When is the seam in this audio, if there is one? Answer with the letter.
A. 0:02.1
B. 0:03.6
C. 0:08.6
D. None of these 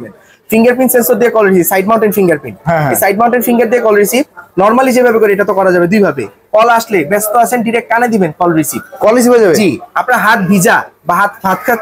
D